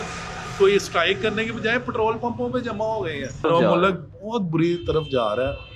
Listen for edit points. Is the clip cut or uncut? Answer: cut